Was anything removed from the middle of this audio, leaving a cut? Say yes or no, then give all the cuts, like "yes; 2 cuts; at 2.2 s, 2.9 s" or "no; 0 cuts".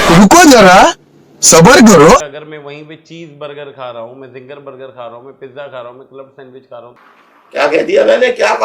yes; 1 cut; at 2.2 s